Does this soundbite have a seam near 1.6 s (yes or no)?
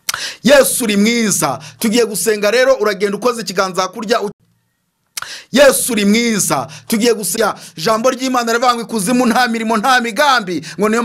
no